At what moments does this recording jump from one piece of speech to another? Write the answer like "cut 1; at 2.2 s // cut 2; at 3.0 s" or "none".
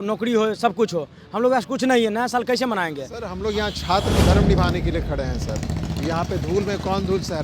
cut 1; at 3.3 s